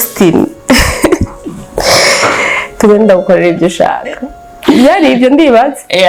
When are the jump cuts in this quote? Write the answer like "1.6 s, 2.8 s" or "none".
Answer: none